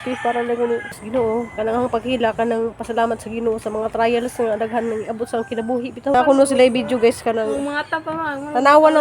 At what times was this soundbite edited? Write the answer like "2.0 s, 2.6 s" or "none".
1.0 s, 6.1 s